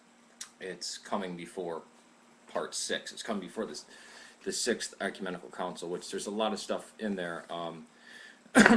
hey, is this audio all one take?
no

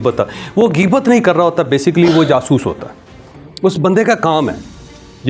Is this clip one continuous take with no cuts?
yes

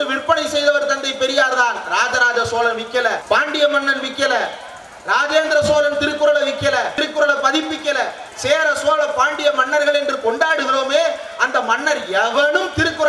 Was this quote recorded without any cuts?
no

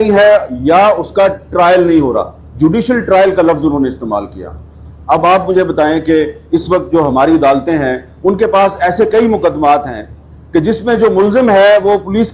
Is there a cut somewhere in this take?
no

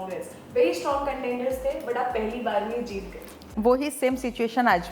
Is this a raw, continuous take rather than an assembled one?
no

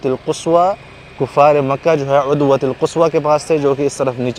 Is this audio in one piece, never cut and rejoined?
yes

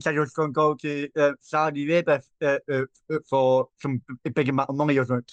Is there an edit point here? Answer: no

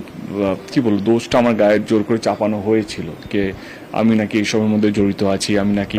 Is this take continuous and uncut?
yes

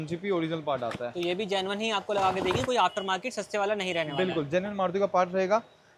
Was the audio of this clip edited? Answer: no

